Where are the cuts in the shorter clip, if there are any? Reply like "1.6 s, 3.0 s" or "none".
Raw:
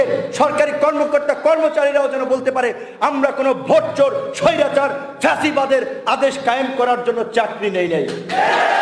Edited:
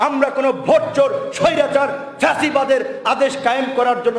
none